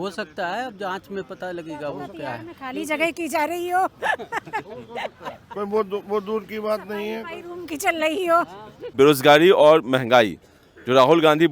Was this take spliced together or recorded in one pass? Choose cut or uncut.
cut